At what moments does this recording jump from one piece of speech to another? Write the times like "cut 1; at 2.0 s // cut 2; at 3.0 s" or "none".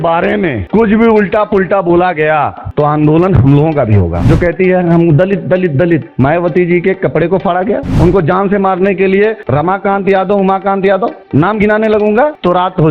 cut 1; at 4.2 s // cut 2; at 7.9 s